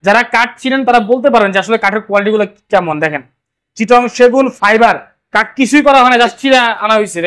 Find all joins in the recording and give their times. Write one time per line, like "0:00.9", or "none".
none